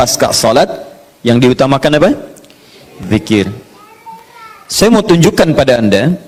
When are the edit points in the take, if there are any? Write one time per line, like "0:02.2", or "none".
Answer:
none